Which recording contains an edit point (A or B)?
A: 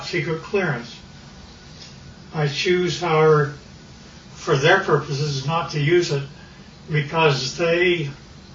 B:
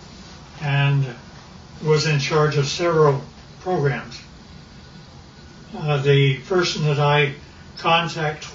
B